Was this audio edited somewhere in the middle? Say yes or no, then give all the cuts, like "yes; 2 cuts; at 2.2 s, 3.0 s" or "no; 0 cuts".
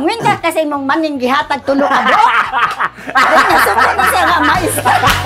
no; 0 cuts